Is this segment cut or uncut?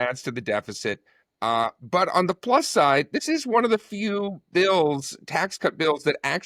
uncut